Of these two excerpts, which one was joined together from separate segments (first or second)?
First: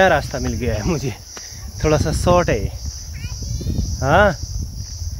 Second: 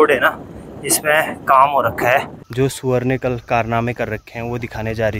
second